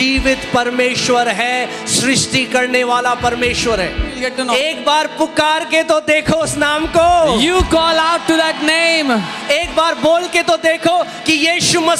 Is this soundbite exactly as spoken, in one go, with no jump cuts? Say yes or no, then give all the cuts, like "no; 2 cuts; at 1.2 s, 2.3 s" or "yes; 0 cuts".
no; 1 cut; at 4.3 s